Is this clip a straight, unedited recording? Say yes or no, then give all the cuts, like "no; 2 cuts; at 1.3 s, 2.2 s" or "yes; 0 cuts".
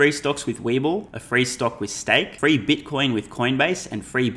no; 2 cuts; at 1.2 s, 2.3 s